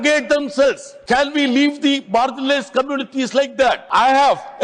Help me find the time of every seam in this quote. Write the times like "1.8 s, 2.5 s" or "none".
0.9 s, 3.8 s